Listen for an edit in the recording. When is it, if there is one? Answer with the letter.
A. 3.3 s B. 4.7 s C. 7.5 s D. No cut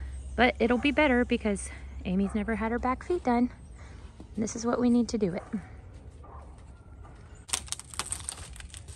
C